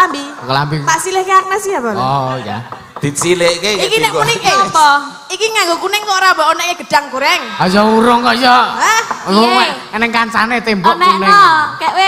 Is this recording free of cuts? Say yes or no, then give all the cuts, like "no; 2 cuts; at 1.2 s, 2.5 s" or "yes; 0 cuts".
yes; 0 cuts